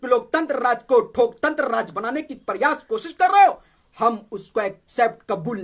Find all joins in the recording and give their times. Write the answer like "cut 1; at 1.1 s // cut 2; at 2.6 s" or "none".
cut 1; at 3.8 s